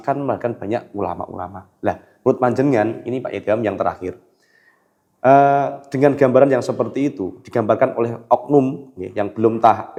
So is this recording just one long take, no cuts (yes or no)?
yes